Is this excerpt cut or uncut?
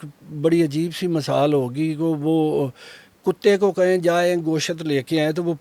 uncut